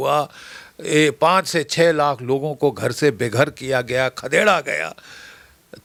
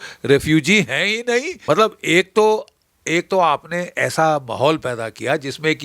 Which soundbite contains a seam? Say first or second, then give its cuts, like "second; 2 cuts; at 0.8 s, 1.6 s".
second; 1 cut; at 1.5 s